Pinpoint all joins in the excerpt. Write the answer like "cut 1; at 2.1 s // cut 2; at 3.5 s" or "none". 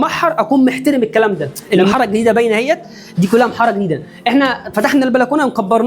cut 1; at 1.5 s